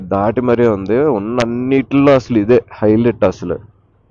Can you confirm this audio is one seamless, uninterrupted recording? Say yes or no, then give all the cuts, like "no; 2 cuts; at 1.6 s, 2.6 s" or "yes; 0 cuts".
yes; 0 cuts